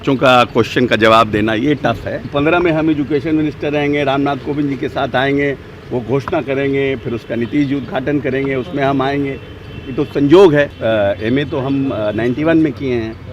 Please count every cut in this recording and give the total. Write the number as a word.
two